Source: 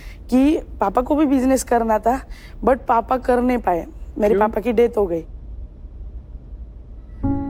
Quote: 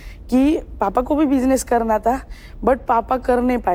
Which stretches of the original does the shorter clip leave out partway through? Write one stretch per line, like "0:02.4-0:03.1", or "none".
none